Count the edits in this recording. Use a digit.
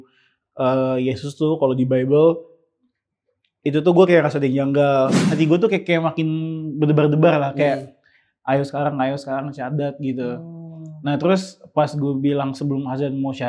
1